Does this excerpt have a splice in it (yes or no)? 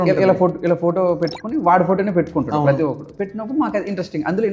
no